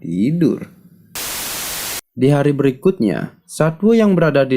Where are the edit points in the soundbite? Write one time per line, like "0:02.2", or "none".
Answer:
0:01.5